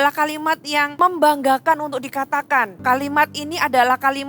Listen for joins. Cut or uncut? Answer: cut